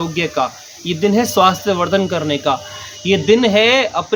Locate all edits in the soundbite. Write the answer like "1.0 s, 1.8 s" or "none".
none